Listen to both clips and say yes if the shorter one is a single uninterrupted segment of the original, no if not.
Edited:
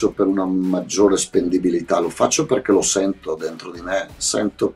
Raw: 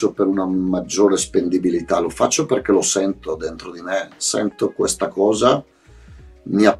yes